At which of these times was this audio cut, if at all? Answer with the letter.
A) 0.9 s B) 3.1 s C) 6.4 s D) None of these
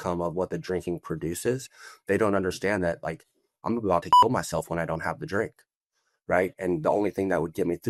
D